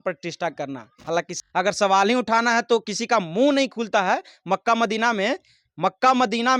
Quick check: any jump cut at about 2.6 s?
no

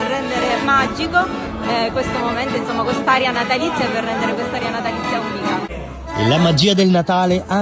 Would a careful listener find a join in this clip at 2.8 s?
no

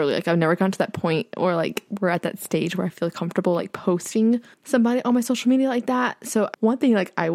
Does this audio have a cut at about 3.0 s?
no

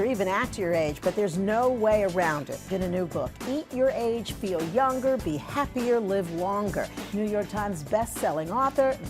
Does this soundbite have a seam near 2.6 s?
yes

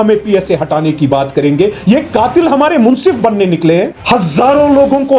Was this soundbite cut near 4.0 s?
yes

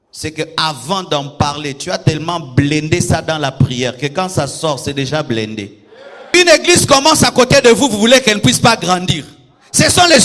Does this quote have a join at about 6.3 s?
yes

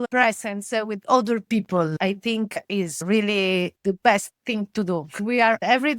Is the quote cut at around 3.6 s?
no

